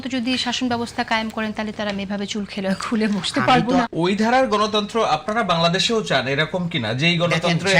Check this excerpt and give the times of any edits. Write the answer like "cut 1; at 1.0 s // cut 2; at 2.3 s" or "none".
cut 1; at 3.9 s